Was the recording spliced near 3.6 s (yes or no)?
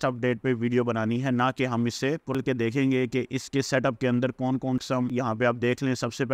no